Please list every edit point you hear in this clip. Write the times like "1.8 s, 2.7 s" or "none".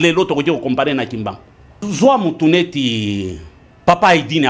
1.8 s

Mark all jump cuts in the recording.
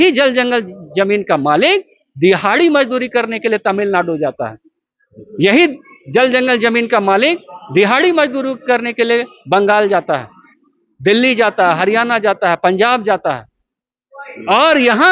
none

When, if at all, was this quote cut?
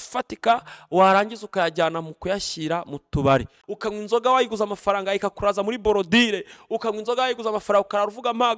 3.6 s

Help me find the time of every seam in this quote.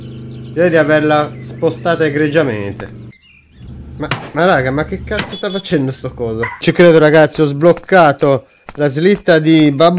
3.1 s, 6.5 s

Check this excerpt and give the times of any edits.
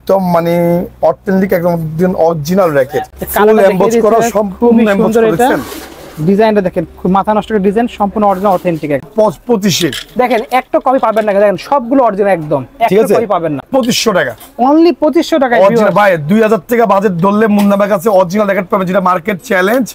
3.0 s, 9.0 s, 13.6 s

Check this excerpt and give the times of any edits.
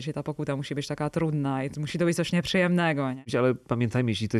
3.3 s

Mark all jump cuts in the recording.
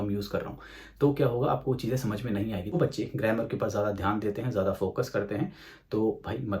2.7 s

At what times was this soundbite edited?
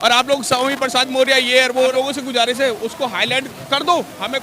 1.9 s

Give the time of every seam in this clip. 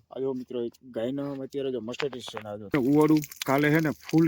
2.7 s

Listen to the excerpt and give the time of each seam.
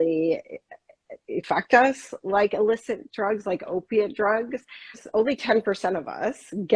1.4 s, 5.0 s

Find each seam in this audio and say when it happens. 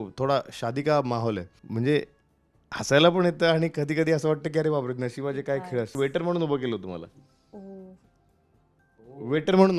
1.6 s, 5.9 s

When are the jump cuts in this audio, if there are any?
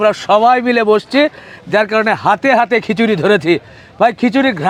none

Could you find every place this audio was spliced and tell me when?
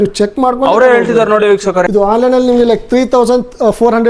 1.9 s

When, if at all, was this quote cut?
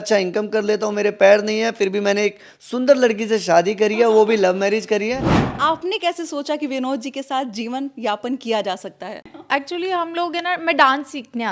5.4 s, 9.3 s

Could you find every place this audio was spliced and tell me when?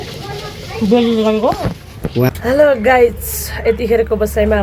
2.3 s

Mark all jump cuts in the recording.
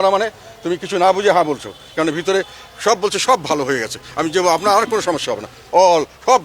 none

